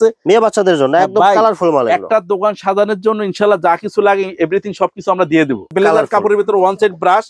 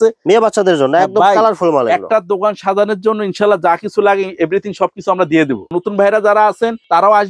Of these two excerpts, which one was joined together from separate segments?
first; 1 cut; at 5.6 s

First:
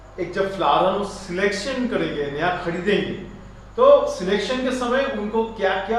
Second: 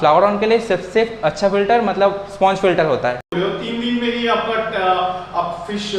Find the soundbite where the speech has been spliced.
second; 1 cut; at 3.3 s

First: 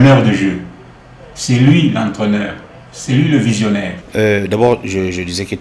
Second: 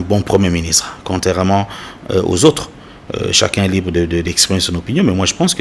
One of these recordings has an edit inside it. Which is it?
first; 1 cut; at 4.0 s

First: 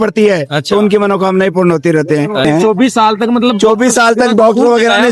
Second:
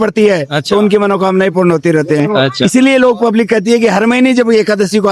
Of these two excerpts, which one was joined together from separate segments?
first; 1 cut; at 2.5 s

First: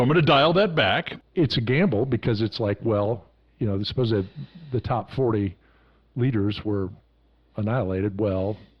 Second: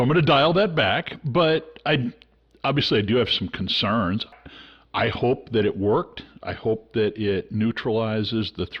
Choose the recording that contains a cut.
first; 1 cut; at 1.1 s

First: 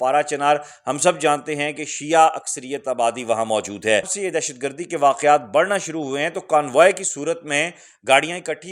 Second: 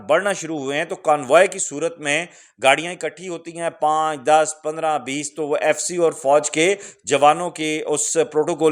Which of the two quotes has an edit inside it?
first; 1 cut; at 4.1 s

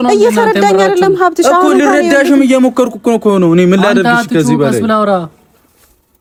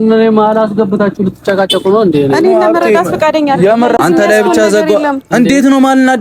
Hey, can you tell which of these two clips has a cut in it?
second; 1 cut; at 4.0 s

